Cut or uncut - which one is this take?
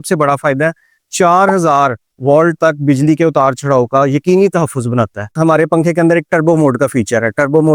cut